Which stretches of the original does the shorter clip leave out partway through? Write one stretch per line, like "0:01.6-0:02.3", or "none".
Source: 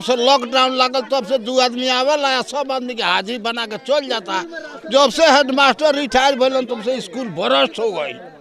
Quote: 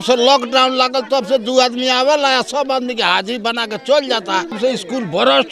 0:04.5-0:06.8

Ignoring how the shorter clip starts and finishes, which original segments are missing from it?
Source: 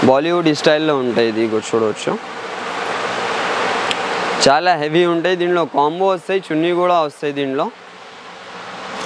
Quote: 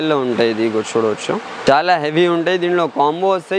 0:02.4-0:04.4

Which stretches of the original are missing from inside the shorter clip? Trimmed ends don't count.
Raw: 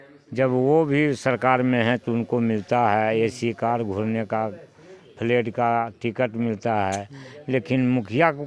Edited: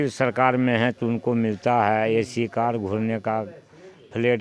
none

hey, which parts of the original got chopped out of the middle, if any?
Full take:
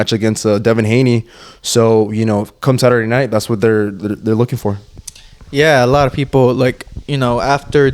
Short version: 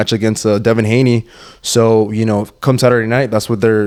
none

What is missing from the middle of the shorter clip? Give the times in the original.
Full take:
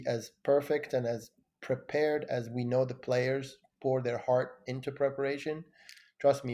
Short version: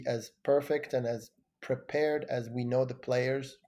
none

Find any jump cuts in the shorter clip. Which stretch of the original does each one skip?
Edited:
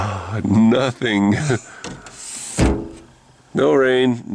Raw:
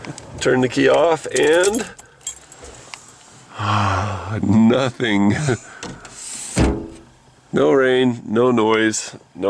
none

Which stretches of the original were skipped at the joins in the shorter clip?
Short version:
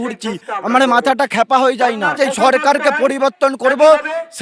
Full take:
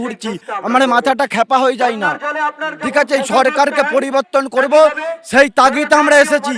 0:02.2-0:03.1

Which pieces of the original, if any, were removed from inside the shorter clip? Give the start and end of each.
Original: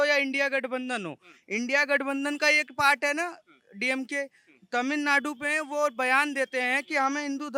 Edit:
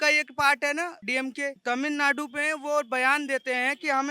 0:03.7-0:04.4

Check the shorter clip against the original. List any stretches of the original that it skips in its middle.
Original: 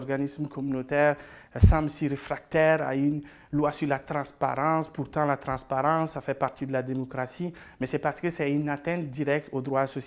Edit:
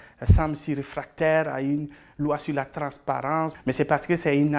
0:04.9-0:07.7

